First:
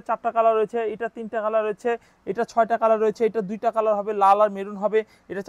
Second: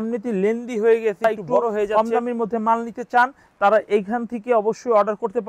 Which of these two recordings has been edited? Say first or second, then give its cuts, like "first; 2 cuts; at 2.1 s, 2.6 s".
second; 1 cut; at 2.0 s